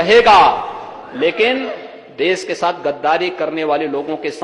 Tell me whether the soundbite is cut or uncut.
uncut